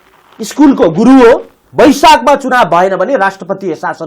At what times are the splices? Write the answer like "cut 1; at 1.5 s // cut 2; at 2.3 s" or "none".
cut 1; at 1.6 s